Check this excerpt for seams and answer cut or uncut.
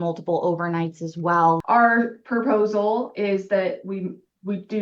cut